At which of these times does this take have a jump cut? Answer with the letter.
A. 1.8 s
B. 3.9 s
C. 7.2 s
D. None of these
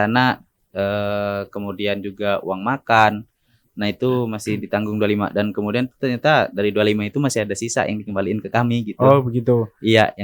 D